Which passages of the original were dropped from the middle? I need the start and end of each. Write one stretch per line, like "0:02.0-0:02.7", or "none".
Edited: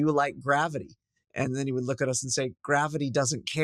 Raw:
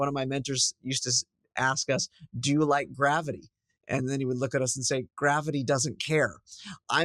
none